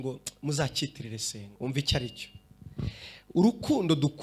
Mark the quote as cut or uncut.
cut